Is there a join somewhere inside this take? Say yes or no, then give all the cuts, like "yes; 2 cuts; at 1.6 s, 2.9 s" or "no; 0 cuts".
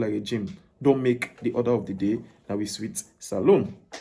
no; 0 cuts